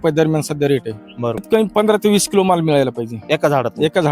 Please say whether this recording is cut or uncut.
cut